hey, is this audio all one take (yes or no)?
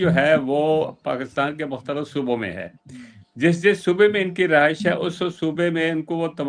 yes